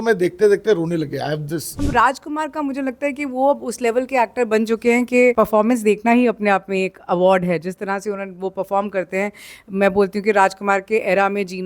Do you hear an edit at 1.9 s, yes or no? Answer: yes